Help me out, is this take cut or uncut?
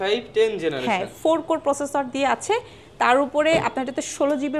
uncut